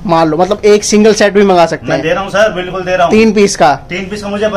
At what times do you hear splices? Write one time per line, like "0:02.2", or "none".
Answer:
none